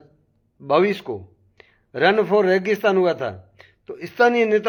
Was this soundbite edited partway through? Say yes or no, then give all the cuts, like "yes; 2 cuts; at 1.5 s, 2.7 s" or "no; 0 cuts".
no; 0 cuts